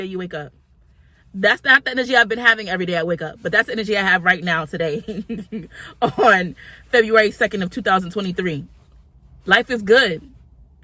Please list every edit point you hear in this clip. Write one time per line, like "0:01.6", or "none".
none